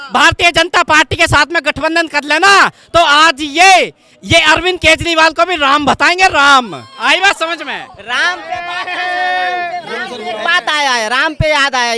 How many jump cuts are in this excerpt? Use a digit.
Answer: 0